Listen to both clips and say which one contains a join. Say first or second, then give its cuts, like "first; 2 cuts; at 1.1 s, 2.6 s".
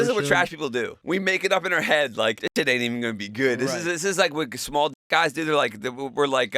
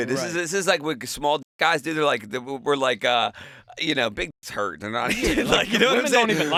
first; 2 cuts; at 1.0 s, 2.4 s